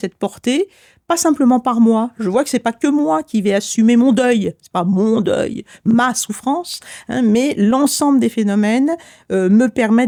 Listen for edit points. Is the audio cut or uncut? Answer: uncut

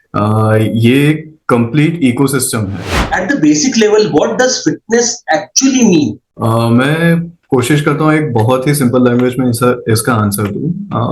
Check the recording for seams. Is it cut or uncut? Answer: cut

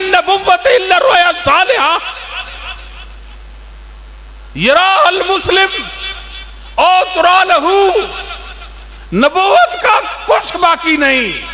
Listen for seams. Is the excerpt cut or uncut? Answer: uncut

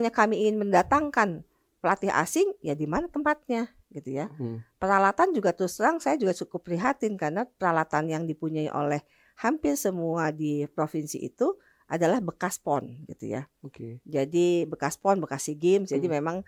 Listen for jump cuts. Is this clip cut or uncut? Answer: uncut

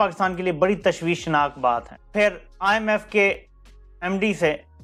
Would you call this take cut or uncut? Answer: uncut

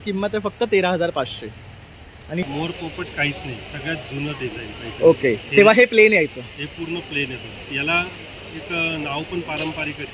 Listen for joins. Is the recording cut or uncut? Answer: cut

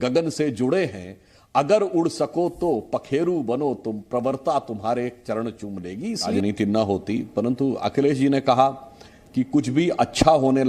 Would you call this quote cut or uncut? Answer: cut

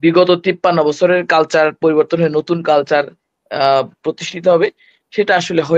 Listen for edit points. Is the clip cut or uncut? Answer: uncut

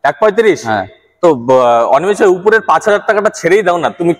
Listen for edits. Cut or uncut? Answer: uncut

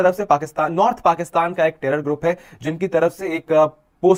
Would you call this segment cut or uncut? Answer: uncut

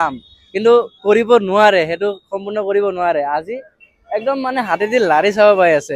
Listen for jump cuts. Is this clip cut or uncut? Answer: uncut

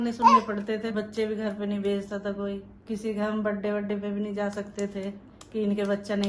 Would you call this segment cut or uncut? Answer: cut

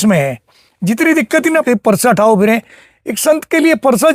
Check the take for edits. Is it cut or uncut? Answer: cut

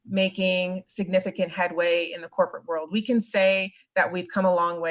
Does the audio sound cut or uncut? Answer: uncut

